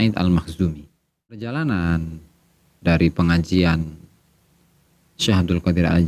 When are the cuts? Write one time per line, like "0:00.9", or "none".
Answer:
0:01.4